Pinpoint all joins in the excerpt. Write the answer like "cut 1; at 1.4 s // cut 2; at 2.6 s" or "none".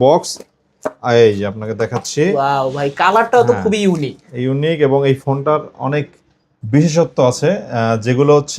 none